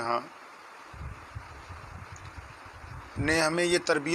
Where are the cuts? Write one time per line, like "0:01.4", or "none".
none